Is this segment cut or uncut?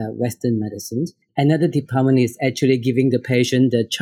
cut